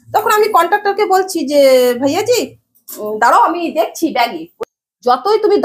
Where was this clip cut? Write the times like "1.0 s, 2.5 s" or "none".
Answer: 4.5 s